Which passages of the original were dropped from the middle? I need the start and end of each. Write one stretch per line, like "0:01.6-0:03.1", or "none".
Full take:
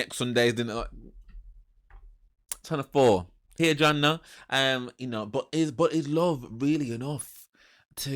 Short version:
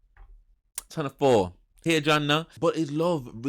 0:04.3-0:05.7